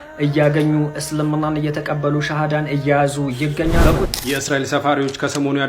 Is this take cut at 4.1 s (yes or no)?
yes